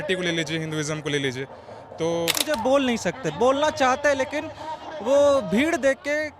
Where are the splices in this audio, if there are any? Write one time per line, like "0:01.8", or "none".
0:02.5